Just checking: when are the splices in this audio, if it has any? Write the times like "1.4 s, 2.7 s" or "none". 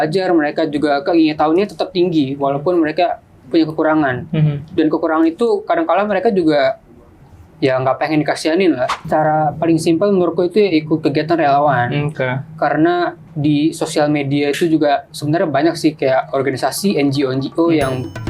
9.0 s

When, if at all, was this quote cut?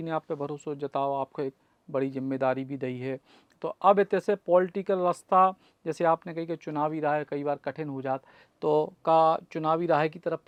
none

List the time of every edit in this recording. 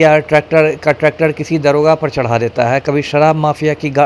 none

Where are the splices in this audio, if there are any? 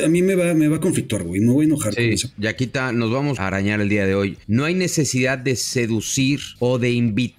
2.0 s, 3.4 s, 4.4 s, 6.5 s

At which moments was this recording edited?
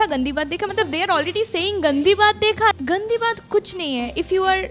2.8 s

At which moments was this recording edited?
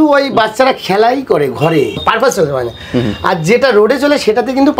2.0 s

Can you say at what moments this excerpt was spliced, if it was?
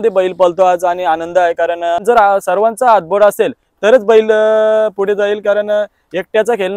2.0 s

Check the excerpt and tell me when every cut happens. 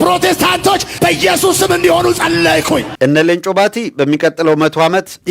2.9 s

